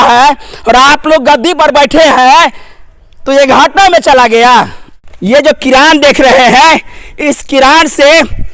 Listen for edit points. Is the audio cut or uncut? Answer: cut